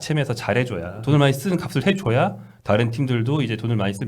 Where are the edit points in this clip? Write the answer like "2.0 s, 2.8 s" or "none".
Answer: 1.0 s

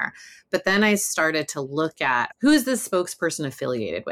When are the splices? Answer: 2.3 s

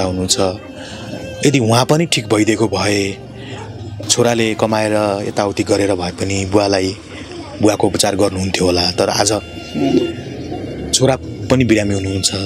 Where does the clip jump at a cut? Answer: none

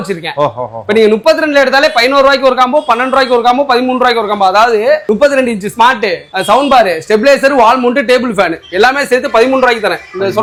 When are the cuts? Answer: none

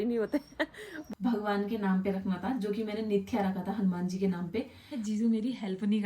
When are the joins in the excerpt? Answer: 1.2 s, 4.9 s

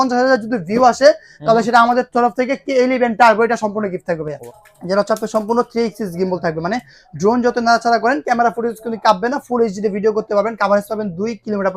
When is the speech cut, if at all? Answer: 4.4 s

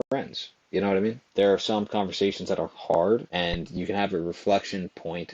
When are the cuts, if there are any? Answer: 1.2 s, 3.3 s

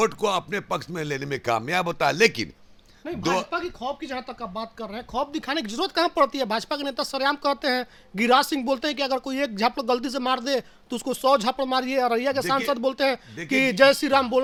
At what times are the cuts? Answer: none

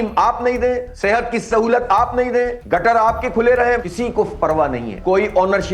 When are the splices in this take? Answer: 0.9 s, 2.6 s, 3.9 s, 4.9 s

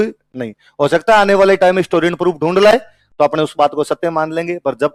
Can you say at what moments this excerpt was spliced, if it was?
none

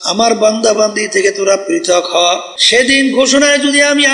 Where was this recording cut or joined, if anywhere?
2.5 s

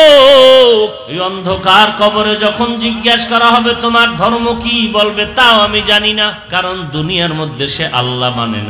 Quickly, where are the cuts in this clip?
1.1 s, 6.4 s

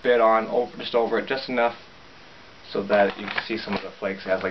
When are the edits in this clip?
none

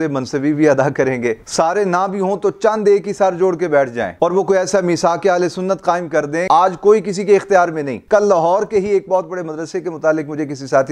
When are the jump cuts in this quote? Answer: 1.4 s, 6.4 s, 8.0 s

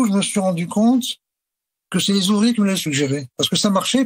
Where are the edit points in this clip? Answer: 3.2 s

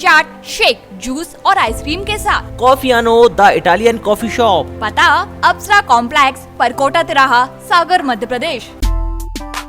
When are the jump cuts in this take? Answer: 8.7 s

